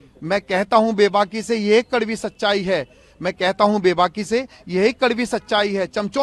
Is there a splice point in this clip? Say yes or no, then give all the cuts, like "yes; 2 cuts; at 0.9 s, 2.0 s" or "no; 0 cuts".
no; 0 cuts